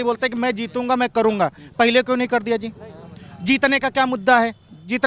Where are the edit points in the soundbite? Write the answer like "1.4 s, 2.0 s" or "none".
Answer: none

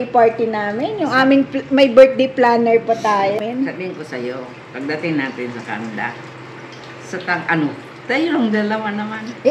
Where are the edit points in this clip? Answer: 3.4 s

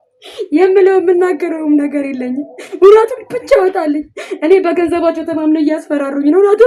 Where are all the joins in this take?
none

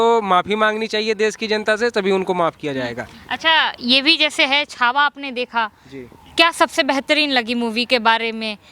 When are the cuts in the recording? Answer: none

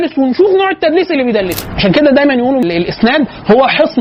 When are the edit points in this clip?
1.6 s

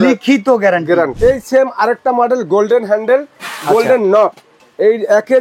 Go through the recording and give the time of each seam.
1.1 s, 4.6 s

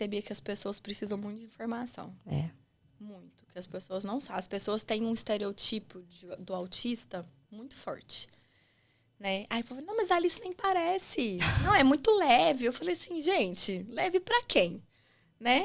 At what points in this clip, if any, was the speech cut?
none

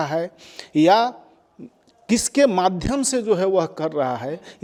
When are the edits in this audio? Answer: none

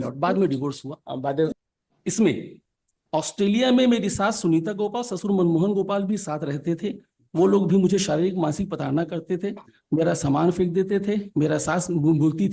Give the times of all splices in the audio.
1.6 s

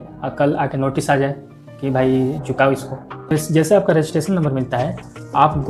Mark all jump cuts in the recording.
3.3 s

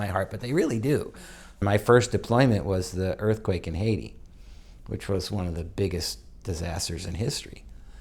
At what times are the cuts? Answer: 1.6 s

